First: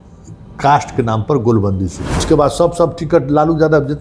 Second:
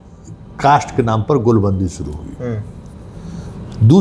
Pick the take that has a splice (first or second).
first